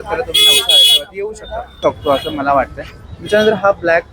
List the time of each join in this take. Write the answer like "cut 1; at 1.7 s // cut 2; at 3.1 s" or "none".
cut 1; at 1.8 s